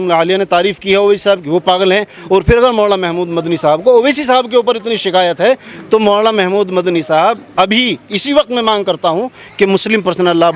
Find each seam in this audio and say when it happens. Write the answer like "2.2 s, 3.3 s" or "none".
none